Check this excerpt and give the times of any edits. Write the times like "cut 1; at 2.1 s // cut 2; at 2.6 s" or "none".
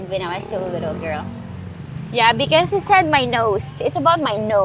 none